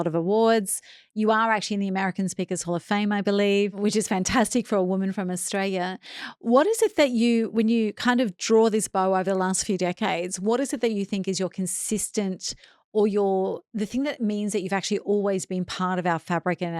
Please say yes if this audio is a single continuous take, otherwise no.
yes